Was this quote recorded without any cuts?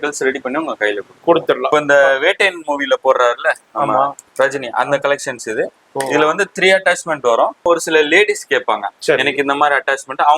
no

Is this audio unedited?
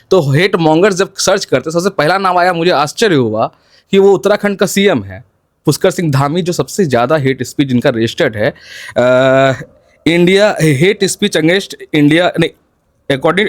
yes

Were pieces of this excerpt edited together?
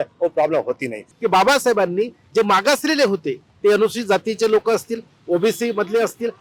yes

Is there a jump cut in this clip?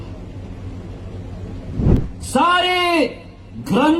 yes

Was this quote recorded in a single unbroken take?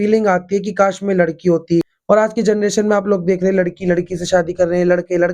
no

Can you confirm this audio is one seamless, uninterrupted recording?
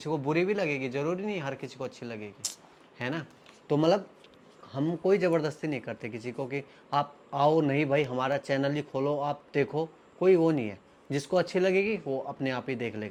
yes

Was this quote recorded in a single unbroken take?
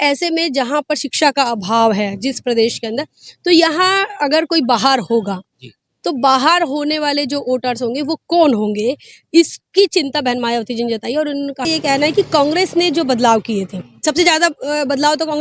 no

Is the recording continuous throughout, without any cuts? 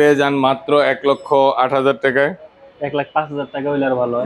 yes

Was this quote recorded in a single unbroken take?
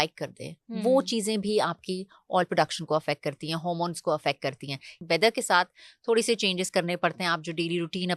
no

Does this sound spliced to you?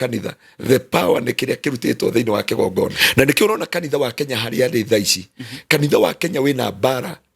yes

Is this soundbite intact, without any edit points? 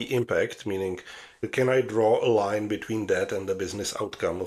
no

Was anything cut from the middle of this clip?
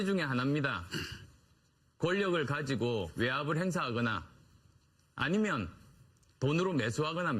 no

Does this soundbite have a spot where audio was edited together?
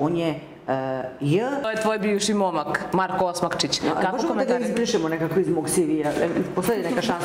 yes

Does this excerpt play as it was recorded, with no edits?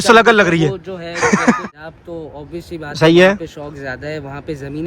no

